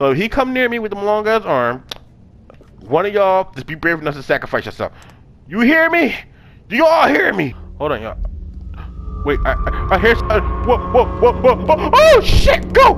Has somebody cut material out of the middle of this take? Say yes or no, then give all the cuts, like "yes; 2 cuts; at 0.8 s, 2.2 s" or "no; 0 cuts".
yes; 1 cut; at 7.6 s